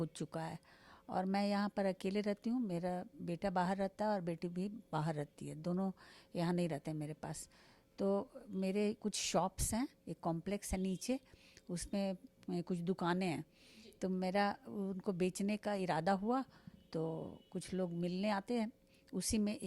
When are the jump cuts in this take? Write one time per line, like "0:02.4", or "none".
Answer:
none